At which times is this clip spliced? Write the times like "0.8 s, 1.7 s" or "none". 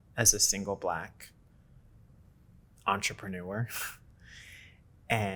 none